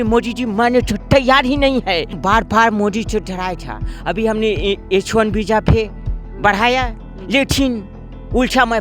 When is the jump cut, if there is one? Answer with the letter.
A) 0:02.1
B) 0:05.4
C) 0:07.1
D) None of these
A